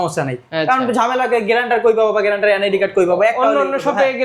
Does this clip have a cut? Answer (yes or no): no